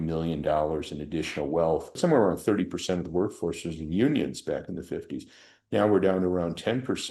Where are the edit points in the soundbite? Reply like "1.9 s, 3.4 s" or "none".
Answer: 2.0 s